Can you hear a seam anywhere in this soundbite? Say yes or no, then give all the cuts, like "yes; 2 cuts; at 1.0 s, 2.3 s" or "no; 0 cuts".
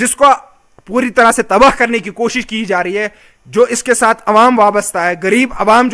no; 0 cuts